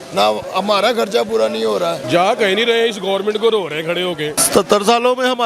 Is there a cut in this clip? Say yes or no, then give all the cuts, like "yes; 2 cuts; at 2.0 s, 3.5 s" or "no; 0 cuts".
yes; 2 cuts; at 2.0 s, 4.4 s